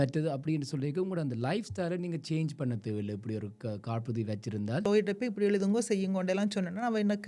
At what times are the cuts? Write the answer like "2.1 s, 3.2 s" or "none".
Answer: 4.9 s